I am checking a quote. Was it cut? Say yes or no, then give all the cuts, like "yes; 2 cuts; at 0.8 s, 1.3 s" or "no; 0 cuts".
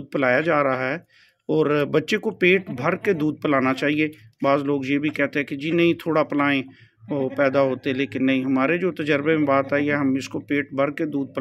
no; 0 cuts